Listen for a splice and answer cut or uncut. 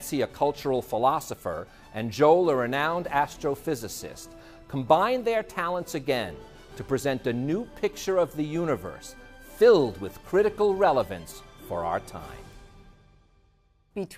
cut